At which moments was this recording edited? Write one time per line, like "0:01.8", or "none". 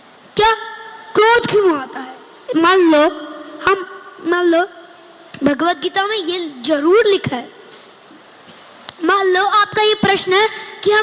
none